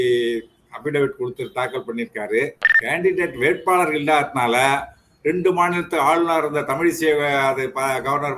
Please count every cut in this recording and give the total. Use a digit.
1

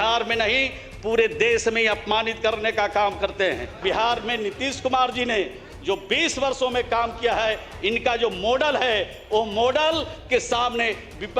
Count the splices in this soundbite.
1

